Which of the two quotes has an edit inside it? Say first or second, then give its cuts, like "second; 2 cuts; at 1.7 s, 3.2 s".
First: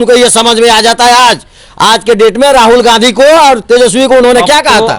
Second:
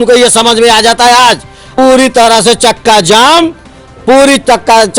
second; 1 cut; at 1.6 s